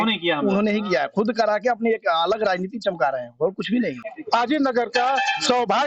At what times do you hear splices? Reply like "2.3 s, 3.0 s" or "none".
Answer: 4.1 s